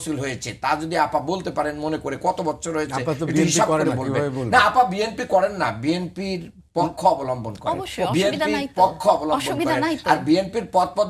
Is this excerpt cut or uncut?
uncut